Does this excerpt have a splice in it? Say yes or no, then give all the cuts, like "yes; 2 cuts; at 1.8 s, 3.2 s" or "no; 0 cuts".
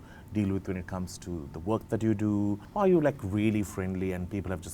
yes; 1 cut; at 2.6 s